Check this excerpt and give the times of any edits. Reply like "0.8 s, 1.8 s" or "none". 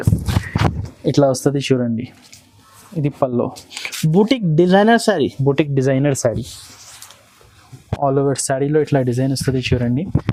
none